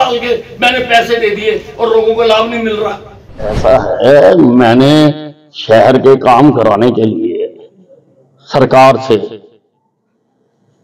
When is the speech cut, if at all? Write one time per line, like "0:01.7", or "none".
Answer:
0:03.5